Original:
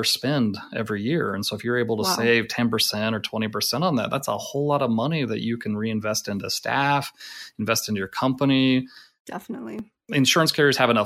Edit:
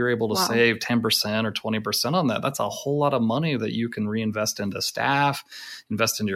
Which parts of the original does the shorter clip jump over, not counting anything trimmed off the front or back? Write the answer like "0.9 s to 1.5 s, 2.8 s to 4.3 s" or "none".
none